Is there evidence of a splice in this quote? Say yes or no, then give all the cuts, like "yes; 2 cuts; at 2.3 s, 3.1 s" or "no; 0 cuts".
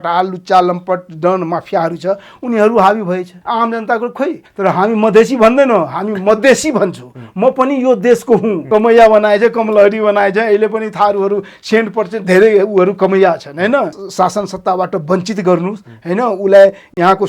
yes; 4 cuts; at 3.3 s, 4.5 s, 8.6 s, 14.0 s